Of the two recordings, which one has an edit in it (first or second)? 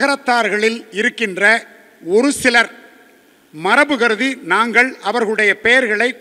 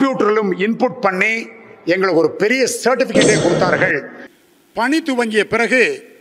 second